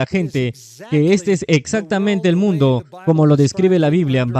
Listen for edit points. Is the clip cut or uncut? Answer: uncut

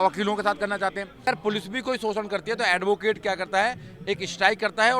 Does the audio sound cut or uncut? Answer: cut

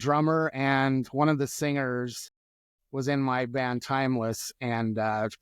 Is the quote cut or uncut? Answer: uncut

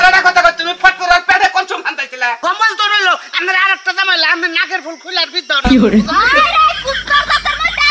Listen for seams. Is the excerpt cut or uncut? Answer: cut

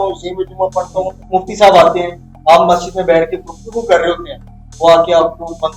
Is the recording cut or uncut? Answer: cut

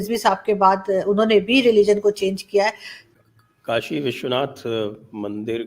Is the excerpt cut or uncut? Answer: cut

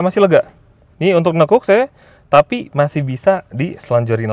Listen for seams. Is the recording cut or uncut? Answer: uncut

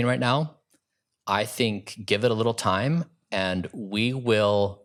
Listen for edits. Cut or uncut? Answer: uncut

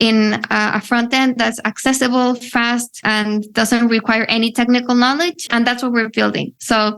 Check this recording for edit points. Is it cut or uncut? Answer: cut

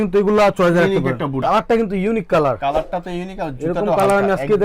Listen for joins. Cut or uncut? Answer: cut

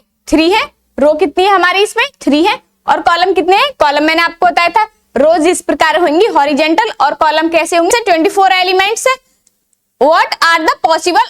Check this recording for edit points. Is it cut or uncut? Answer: cut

